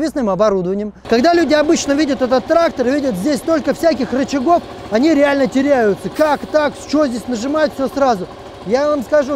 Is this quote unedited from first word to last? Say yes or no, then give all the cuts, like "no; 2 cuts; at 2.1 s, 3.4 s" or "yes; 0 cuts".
no; 1 cut; at 0.9 s